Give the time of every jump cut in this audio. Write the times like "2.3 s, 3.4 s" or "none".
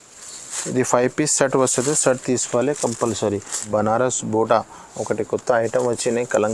3.7 s